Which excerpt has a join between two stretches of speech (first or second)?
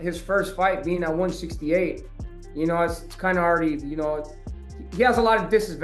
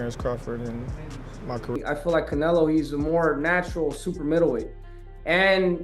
second